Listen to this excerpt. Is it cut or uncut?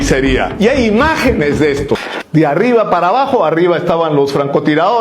cut